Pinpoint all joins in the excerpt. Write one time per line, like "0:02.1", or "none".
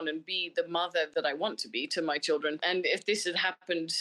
0:01.1